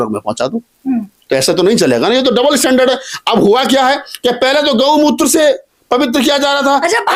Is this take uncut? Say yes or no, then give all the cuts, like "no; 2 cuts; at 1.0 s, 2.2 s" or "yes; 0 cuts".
yes; 0 cuts